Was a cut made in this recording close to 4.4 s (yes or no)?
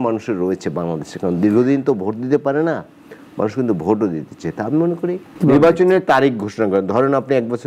no